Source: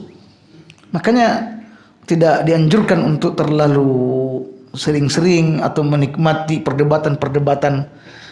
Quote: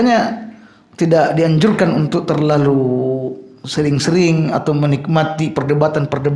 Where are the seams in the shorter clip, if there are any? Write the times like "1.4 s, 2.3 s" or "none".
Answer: none